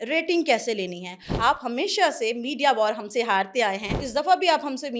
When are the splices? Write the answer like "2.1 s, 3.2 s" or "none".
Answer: 1.4 s, 3.9 s